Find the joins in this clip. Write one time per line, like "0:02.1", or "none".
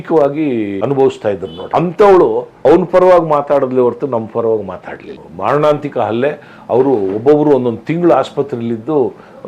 0:00.8
0:01.5
0:02.5
0:05.2